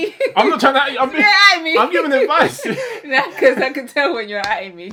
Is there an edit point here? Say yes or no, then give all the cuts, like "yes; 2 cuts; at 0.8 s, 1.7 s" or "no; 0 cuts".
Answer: no; 0 cuts